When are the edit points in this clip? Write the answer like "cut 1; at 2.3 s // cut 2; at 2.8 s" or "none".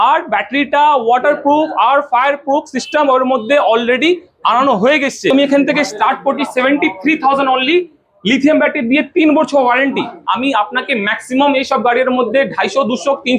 cut 1; at 5.3 s // cut 2; at 10.2 s